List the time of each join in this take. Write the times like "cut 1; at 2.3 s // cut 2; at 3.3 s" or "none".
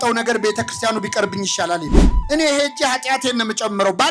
cut 1; at 2.1 s